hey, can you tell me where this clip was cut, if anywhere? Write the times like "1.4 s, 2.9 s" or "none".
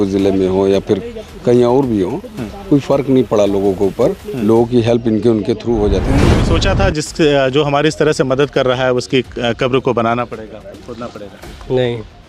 6.3 s